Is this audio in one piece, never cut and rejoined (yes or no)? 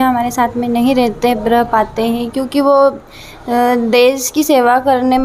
yes